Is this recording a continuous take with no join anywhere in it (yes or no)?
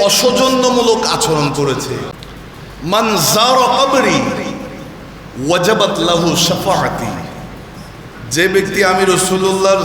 no